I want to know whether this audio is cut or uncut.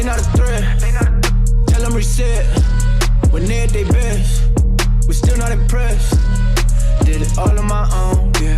uncut